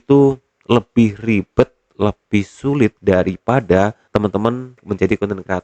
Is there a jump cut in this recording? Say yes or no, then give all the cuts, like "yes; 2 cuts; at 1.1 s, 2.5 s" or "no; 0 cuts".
yes; 2 cuts; at 3.0 s, 4.5 s